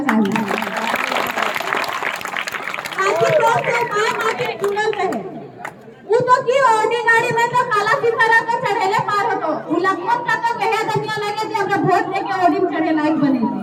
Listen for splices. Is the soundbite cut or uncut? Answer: uncut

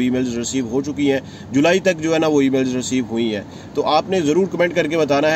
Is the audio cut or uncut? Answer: uncut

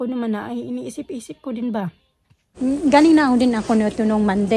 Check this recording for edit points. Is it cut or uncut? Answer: cut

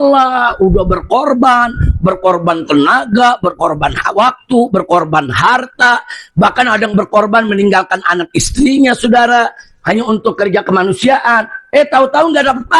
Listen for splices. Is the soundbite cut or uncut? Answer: uncut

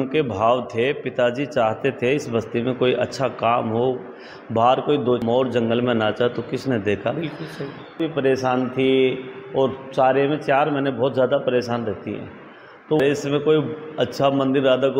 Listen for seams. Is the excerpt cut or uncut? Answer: cut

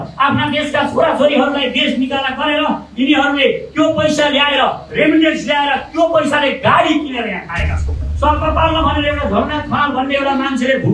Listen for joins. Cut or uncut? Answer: cut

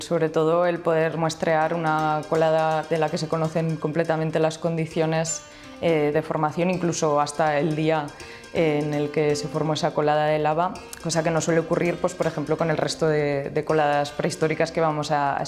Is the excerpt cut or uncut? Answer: uncut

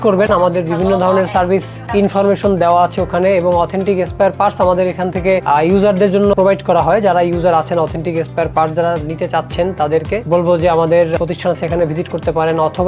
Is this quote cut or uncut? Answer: uncut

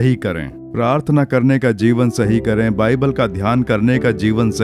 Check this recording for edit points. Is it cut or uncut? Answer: uncut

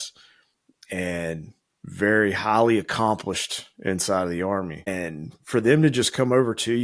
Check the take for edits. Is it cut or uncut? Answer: cut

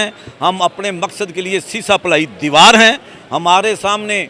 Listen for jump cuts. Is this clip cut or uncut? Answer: uncut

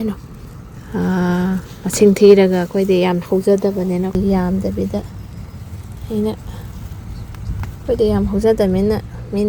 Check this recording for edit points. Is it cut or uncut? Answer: cut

